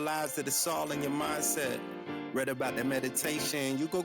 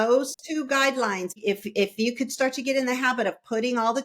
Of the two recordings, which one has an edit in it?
second; 1 cut; at 1.4 s

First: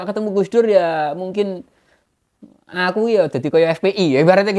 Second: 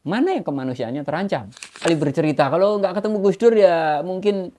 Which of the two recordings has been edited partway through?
second; 1 cut; at 1.8 s

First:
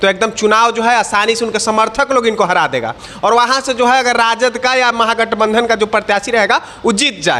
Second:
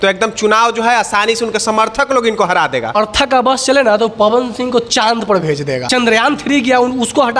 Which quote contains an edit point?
second; 2 cuts; at 3.0 s, 5.8 s

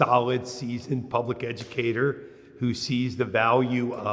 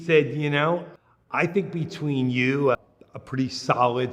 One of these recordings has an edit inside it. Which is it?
second; 2 cuts; at 0.9 s, 2.8 s

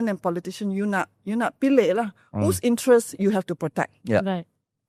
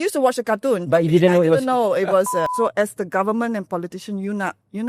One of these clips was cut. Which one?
second; 1 cut; at 2.5 s

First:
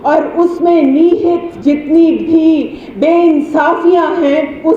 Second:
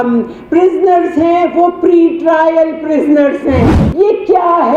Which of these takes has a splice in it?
second; 1 cut; at 3.8 s

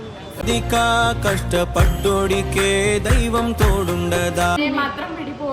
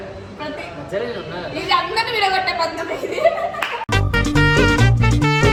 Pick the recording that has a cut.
first; 1 cut; at 4.6 s

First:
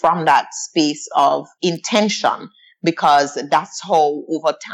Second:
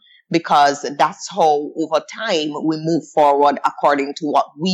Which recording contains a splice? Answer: first; 1 cut; at 1.5 s

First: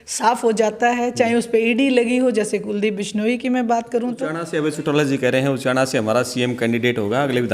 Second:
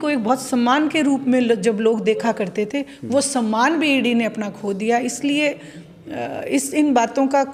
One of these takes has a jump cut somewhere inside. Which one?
first; 1 cut; at 4.4 s

